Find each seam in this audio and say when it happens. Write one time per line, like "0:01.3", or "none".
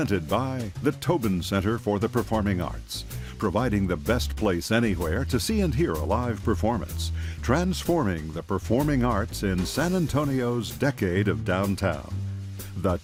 none